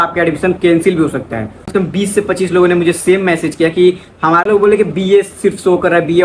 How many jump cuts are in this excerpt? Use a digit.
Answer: 2